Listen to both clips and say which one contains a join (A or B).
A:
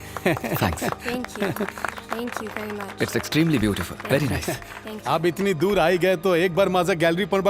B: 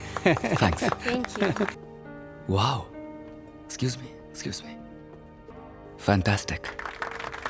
B